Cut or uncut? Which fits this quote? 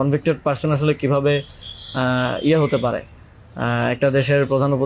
uncut